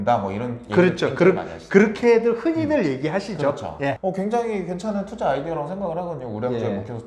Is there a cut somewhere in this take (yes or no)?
yes